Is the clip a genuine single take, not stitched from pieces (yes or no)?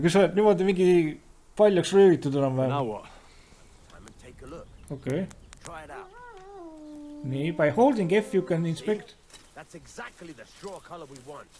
no